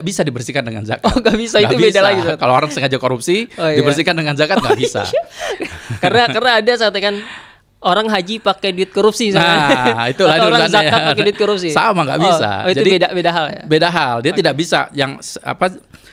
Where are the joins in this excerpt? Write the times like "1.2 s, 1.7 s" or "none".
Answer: none

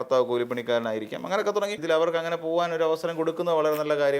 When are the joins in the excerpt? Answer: 1.8 s

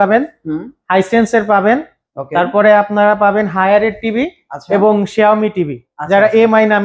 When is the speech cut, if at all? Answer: none

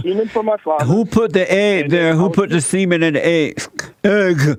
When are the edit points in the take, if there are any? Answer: none

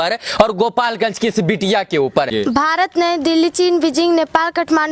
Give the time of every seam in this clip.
2.3 s

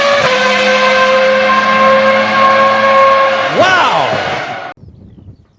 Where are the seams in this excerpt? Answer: none

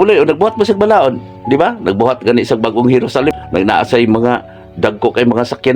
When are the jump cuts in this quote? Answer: 3.3 s

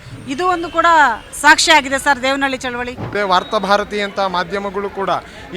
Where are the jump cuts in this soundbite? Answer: 3.1 s

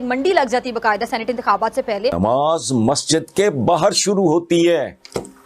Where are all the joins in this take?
2.2 s

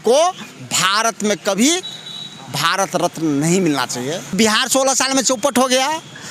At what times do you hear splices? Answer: 4.3 s

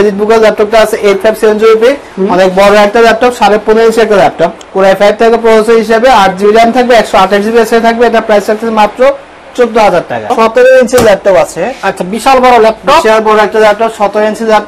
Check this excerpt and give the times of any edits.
4.6 s, 10.3 s

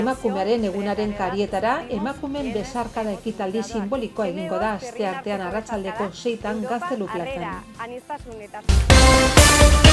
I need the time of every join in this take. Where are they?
8.8 s

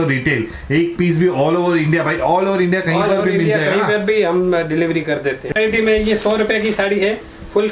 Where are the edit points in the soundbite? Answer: 5.6 s

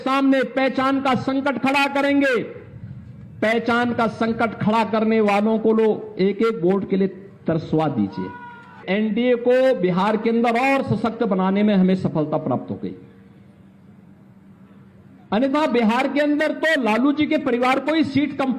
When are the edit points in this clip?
8.8 s

